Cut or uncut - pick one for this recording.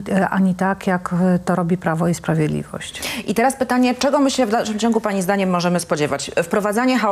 uncut